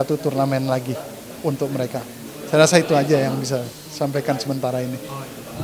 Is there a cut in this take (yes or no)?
no